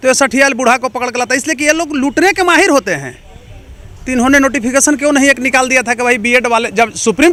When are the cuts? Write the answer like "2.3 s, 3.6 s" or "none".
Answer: none